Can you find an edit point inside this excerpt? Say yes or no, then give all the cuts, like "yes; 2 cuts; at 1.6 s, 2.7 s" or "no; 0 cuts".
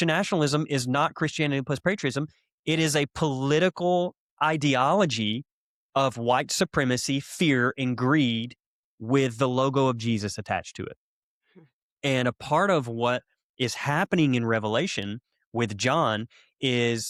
no; 0 cuts